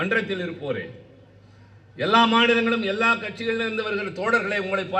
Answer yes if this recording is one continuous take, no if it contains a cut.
yes